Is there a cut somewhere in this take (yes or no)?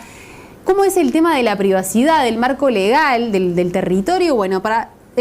yes